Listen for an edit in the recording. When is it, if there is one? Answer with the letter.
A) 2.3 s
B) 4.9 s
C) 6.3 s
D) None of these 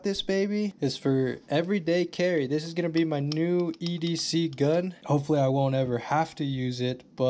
B